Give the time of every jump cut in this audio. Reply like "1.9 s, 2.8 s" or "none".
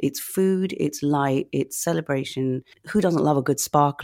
2.7 s

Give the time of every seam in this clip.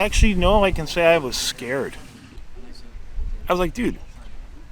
2.4 s

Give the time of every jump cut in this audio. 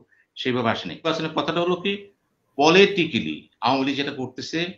1.0 s

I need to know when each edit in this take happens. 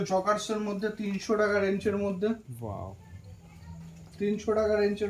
none

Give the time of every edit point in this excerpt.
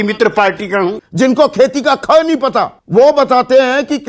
1.0 s, 2.8 s

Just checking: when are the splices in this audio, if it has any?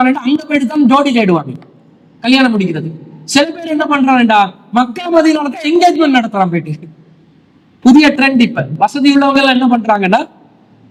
none

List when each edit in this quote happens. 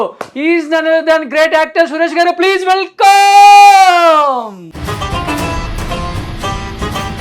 4.7 s

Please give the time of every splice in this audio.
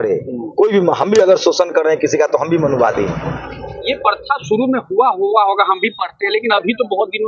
none

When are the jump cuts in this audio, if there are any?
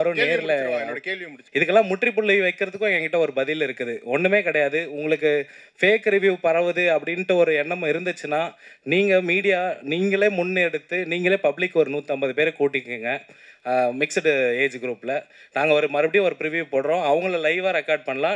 1.4 s

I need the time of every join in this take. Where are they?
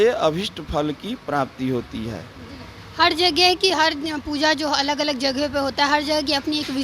none

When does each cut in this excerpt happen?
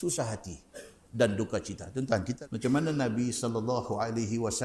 2.3 s

